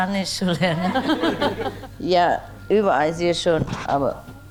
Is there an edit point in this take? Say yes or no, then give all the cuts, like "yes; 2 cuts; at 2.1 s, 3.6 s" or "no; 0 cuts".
yes; 1 cut; at 1.7 s